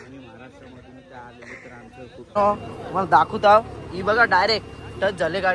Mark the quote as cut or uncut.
cut